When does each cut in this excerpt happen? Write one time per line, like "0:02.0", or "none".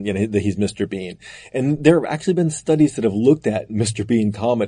none